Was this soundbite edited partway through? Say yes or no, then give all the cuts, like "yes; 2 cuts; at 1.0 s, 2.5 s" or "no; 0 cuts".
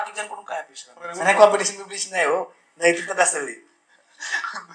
yes; 1 cut; at 1.0 s